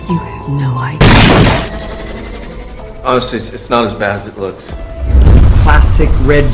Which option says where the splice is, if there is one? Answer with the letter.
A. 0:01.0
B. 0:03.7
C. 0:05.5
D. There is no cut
A